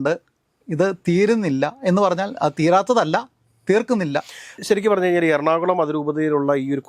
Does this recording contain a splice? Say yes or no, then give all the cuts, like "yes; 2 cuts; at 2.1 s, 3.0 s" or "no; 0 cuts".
no; 0 cuts